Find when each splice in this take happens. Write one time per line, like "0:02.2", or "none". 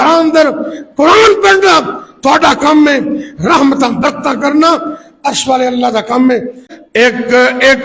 0:06.6